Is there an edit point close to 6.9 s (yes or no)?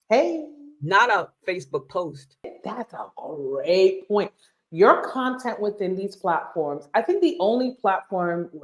no